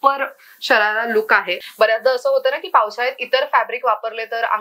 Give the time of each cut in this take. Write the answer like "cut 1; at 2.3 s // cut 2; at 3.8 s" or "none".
cut 1; at 1.6 s